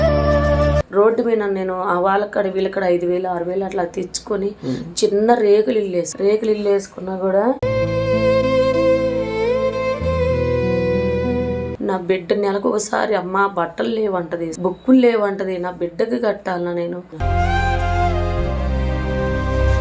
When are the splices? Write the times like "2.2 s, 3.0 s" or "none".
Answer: 0.8 s, 11.7 s, 17.1 s